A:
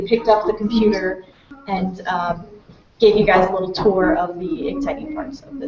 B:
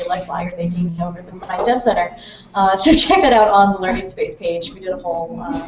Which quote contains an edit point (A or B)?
A